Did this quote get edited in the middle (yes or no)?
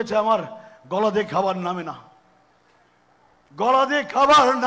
no